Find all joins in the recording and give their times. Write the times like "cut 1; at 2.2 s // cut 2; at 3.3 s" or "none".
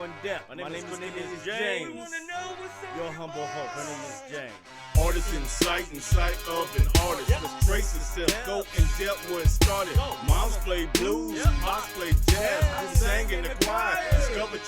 cut 1; at 2.4 s